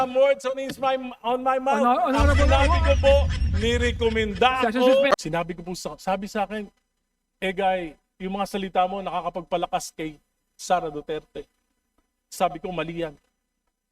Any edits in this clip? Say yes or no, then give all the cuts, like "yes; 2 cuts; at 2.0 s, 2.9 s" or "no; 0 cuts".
yes; 1 cut; at 5.1 s